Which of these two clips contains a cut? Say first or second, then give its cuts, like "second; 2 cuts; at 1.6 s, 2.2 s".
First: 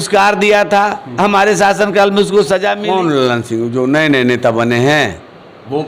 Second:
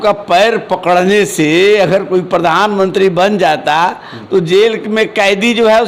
first; 1 cut; at 2.8 s